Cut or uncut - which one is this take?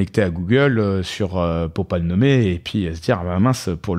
uncut